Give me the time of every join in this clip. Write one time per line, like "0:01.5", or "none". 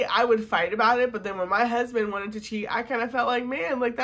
none